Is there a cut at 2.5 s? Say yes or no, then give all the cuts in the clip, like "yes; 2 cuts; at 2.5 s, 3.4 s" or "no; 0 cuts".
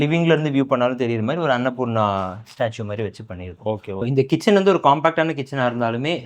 no; 1 cut; at 4.0 s